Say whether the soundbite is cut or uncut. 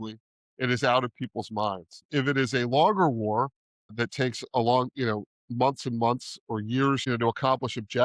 cut